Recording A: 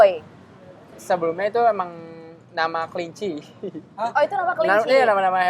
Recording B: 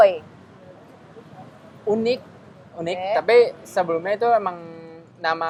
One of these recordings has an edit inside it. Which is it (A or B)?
A